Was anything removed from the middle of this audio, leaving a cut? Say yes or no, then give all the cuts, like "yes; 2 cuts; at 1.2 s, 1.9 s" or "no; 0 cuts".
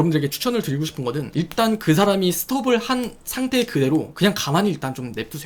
no; 0 cuts